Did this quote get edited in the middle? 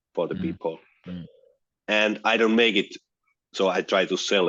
no; 0 cuts

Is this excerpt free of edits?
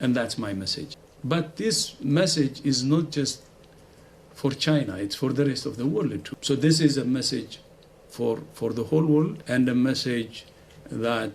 yes; 0 cuts

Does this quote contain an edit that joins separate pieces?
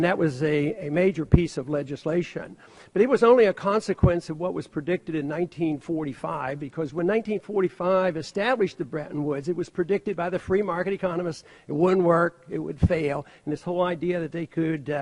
no; 0 cuts

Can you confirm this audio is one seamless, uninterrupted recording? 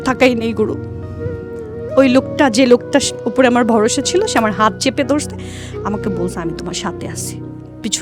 yes; 0 cuts

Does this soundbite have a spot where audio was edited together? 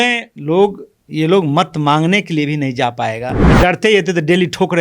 yes; 1 cut; at 3.4 s

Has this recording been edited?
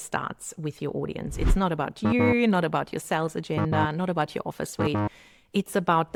no; 0 cuts

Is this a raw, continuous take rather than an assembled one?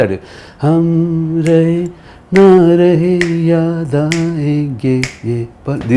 yes; 0 cuts

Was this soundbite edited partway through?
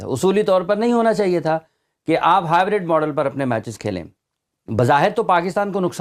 no; 0 cuts

